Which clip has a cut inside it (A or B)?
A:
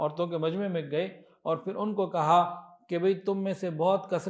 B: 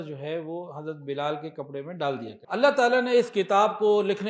B